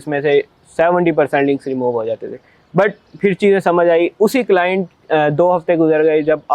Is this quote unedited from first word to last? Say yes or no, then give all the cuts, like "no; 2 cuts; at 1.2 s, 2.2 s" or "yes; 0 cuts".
yes; 0 cuts